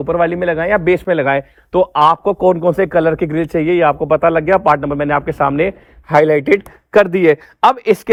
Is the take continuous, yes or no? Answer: yes